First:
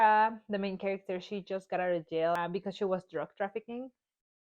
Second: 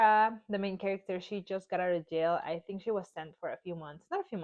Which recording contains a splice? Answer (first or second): first